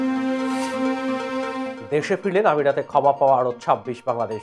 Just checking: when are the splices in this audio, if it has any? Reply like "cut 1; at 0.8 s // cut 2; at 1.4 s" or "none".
cut 1; at 1.7 s